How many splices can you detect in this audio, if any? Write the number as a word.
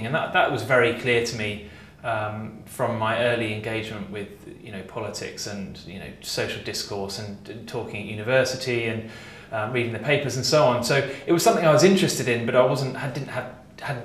zero